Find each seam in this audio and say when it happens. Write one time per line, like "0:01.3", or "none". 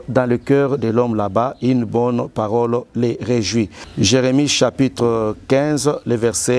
0:03.8